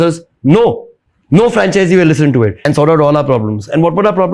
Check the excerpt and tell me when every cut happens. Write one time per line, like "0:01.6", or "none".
0:02.6

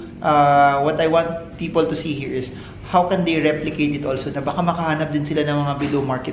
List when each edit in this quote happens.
none

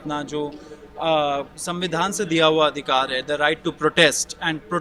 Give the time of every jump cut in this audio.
none

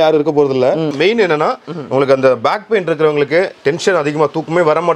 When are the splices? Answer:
0:00.9

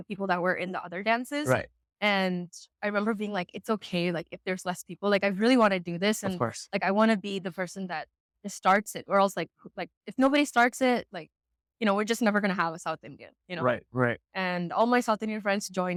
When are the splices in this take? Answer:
none

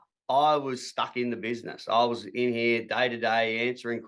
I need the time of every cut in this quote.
none

